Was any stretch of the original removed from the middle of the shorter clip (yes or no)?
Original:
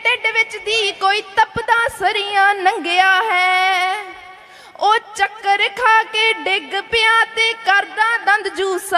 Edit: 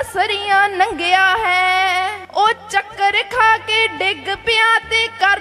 yes